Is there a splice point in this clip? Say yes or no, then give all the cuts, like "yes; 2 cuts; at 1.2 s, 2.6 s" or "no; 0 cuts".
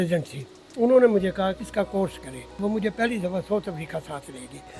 yes; 2 cuts; at 1.6 s, 2.5 s